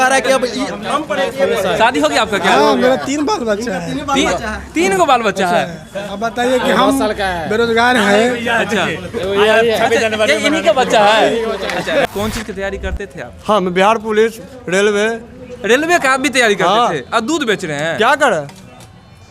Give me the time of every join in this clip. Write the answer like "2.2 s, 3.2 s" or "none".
12.1 s